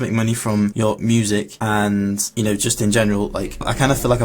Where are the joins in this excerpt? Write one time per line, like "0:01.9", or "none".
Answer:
0:00.7
0:01.5
0:02.3